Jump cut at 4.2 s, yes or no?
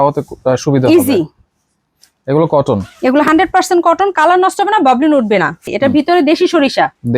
no